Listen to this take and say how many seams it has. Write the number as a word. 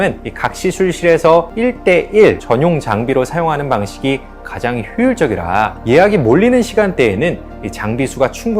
zero